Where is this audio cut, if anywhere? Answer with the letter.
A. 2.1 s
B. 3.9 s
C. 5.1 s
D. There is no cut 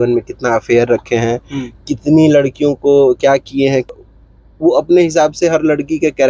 B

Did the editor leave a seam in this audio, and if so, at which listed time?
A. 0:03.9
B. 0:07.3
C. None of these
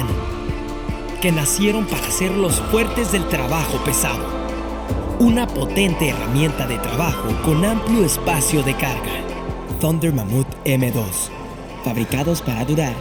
C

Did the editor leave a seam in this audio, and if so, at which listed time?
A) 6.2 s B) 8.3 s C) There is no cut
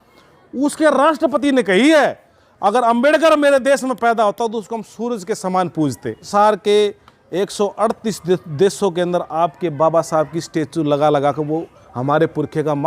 A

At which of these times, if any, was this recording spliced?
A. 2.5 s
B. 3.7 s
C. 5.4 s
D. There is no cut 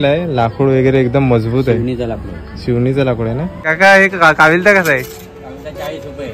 B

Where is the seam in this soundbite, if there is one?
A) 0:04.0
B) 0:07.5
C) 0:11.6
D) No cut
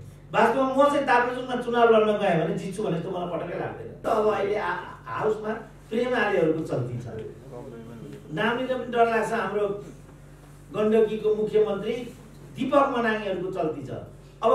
A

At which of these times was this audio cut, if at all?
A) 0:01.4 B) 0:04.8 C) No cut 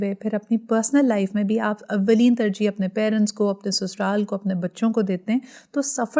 C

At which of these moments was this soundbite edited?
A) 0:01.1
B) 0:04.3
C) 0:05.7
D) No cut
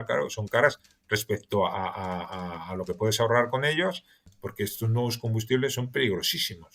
B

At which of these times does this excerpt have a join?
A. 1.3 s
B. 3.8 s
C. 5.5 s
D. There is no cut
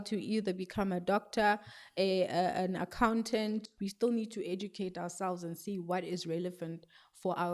B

